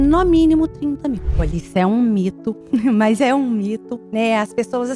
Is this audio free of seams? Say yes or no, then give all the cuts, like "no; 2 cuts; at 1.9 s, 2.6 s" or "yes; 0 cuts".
no; 3 cuts; at 1.3 s, 2.5 s, 4.0 s